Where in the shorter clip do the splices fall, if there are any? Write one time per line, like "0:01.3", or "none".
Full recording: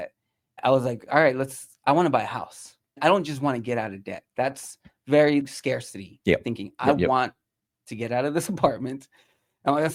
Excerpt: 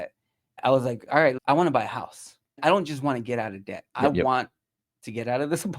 0:01.4
0:03.8